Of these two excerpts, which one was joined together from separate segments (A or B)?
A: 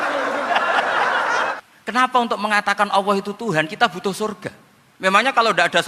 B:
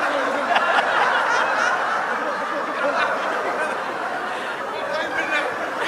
A